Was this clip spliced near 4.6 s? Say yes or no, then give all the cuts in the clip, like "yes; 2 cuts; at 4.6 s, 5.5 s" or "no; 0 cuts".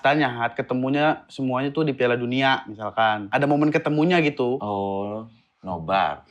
yes; 2 cuts; at 3.2 s, 4.6 s